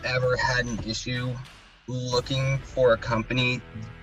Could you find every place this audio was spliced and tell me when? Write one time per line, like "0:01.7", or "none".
none